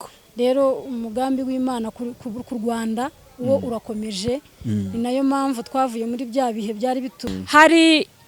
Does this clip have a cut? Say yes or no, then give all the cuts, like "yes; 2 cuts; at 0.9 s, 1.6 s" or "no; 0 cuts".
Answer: yes; 1 cut; at 7.3 s